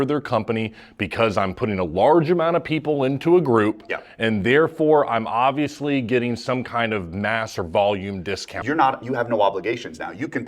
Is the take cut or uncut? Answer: cut